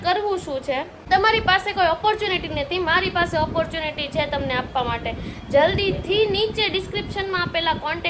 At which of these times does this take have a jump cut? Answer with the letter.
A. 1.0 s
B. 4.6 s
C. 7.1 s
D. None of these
A